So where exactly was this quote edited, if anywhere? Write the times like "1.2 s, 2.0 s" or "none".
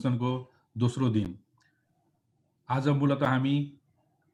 none